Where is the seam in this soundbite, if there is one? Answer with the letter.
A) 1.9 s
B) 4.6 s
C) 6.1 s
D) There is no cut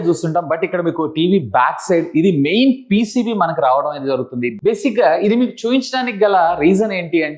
D